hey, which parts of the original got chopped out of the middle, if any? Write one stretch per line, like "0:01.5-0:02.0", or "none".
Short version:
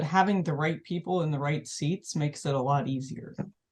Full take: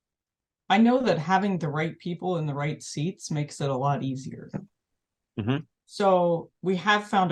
none